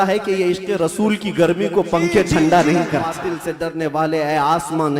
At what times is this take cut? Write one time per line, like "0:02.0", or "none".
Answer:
0:03.2